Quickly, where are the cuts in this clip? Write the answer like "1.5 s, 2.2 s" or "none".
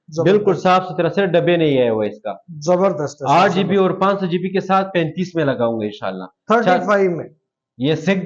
none